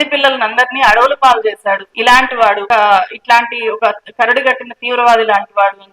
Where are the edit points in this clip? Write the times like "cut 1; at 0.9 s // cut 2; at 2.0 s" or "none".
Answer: cut 1; at 1.9 s // cut 2; at 2.6 s